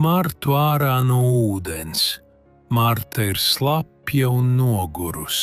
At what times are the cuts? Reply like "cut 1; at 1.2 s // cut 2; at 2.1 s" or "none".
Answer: none